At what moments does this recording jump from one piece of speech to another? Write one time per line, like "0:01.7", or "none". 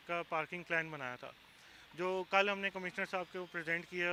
none